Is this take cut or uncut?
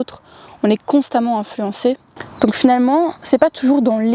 cut